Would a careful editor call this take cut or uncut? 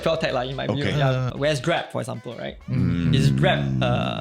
cut